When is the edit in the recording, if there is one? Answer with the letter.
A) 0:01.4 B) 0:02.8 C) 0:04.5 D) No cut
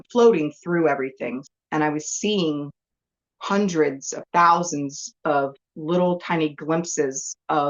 A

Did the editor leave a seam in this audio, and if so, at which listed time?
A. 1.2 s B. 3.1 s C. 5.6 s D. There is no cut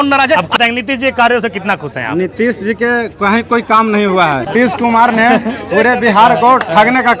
D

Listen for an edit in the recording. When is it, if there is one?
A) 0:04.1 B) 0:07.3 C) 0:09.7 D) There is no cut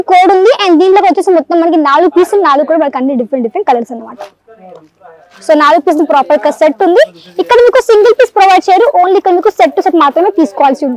D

